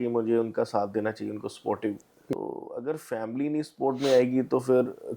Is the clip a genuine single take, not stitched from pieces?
no; 1 cut; at 2.3 s

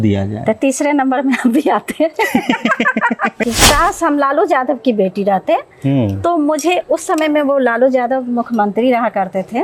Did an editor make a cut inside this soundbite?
yes; 1 cut; at 3.4 s

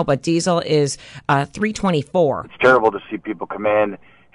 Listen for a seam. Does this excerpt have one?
yes; 1 cut; at 2.5 s

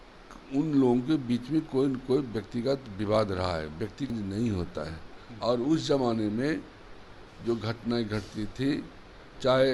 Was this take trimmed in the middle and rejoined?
yes; 1 cut; at 4.1 s

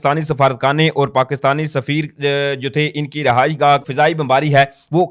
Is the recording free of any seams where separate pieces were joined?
no; 1 cut; at 3.9 s

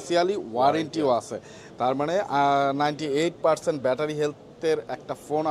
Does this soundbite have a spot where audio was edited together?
no; 0 cuts

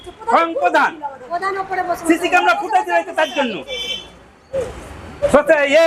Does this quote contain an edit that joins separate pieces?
no; 0 cuts

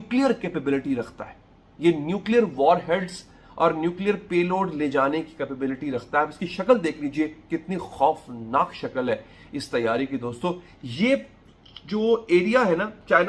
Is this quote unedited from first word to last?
yes; 0 cuts

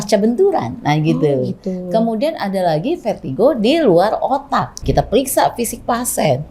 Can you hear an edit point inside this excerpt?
yes; 1 cut; at 4.8 s

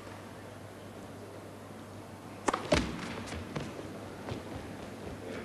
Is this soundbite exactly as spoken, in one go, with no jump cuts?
yes; 0 cuts

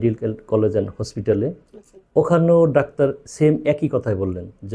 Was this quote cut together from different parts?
no; 0 cuts

